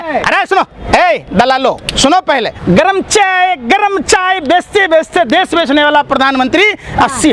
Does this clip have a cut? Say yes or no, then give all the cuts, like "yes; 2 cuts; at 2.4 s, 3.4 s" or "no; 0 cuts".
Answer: yes; 1 cut; at 2.6 s